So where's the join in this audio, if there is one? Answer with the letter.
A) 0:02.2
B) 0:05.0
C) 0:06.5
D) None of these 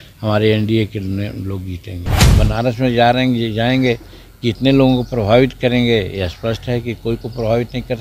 A